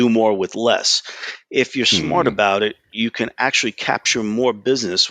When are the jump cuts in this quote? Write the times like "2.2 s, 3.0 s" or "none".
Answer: none